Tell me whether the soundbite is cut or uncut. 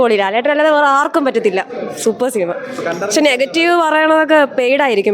uncut